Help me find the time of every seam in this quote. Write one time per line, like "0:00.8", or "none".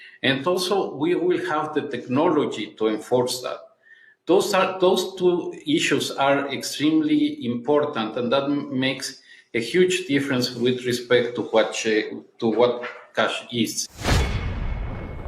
0:13.8